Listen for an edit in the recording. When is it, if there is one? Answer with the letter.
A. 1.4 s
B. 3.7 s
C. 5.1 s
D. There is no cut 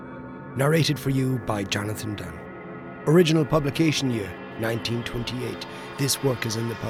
D